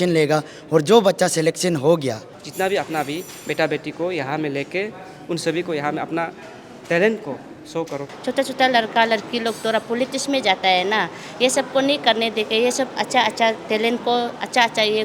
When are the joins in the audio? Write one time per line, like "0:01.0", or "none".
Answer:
0:02.3
0:08.1